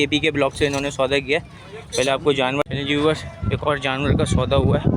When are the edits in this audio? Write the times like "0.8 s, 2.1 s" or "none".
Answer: 2.6 s

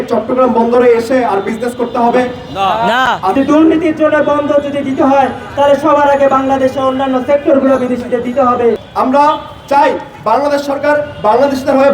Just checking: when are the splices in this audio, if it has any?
3.3 s, 8.8 s

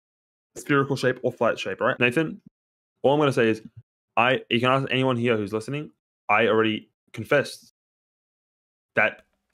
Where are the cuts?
1.9 s

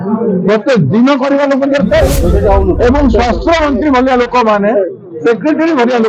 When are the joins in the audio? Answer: 2.2 s

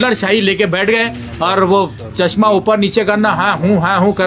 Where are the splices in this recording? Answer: none

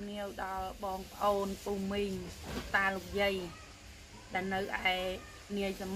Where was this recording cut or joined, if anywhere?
none

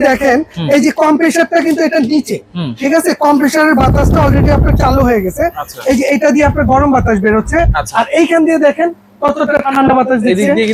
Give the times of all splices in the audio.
none

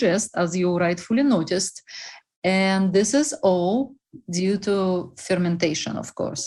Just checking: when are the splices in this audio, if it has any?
none

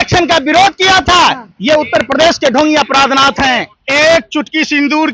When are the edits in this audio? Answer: 3.8 s

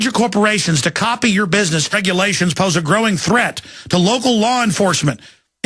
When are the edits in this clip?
none

